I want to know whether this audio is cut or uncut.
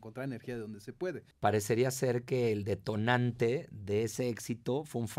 cut